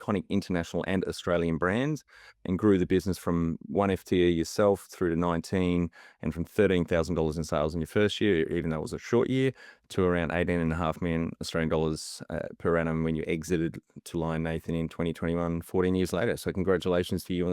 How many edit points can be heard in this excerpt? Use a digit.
0